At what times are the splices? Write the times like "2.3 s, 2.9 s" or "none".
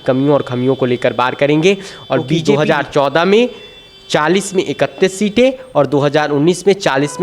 2.4 s